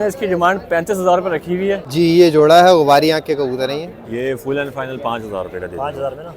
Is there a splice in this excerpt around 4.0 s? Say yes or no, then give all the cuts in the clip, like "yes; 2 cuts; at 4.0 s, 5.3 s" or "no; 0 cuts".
yes; 2 cuts; at 1.9 s, 4.0 s